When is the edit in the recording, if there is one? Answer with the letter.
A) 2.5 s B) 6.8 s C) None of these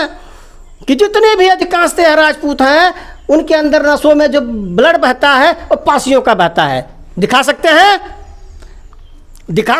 C